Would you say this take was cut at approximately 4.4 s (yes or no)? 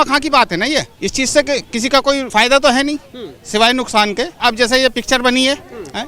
yes